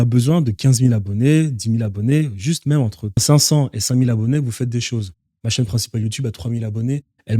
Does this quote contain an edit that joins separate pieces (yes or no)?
yes